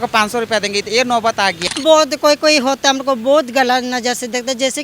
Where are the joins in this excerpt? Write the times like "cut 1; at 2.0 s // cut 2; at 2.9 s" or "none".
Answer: cut 1; at 1.6 s